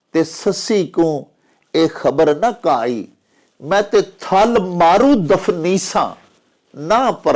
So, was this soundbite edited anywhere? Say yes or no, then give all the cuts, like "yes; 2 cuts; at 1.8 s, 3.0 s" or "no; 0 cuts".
no; 0 cuts